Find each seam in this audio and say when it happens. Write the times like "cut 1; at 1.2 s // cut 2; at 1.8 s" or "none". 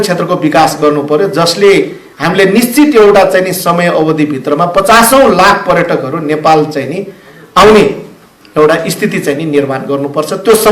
none